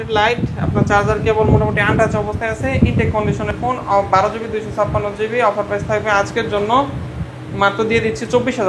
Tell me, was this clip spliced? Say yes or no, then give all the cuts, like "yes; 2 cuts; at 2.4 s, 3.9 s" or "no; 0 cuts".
no; 0 cuts